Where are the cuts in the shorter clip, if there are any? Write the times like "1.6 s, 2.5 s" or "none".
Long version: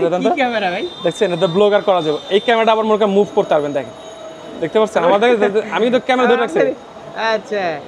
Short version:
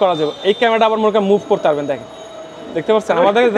none